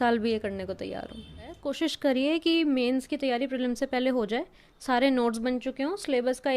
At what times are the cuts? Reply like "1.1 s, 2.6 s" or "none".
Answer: 1.6 s